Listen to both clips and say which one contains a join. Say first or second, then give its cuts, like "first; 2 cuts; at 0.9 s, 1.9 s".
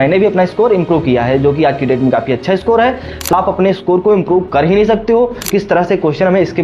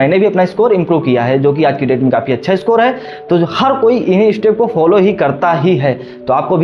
first; 2 cuts; at 3.3 s, 5.5 s